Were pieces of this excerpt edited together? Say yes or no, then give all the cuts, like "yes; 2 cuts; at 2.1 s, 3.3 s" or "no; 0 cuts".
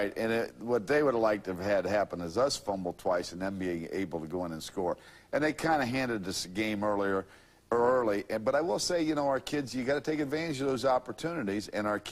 yes; 1 cut; at 3.3 s